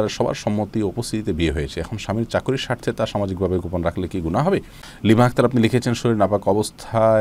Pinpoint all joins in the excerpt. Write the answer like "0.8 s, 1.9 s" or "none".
4.8 s

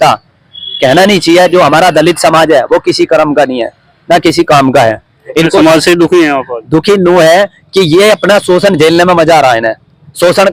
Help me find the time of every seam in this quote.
none

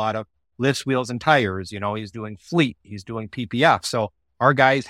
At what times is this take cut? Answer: none

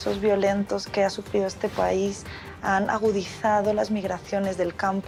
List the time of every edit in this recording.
none

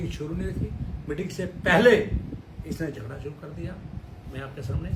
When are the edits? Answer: none

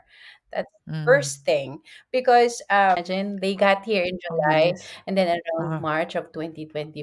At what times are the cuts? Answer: 3.0 s

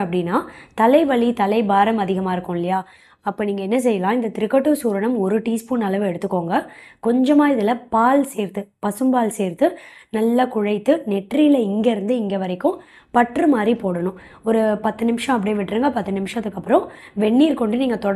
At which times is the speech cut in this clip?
none

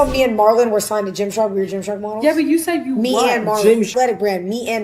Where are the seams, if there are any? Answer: 3.9 s

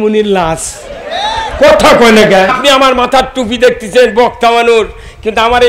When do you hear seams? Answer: 2.5 s

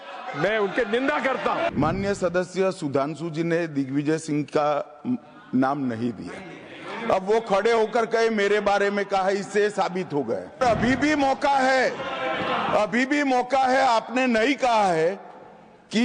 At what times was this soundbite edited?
1.7 s, 10.6 s

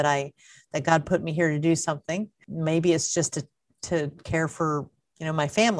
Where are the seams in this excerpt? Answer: 2.4 s

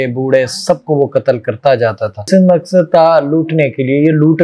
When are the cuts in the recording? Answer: 2.2 s

